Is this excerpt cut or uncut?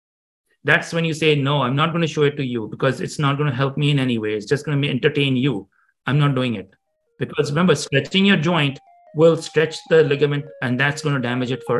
cut